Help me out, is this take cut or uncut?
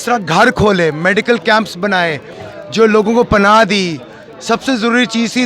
uncut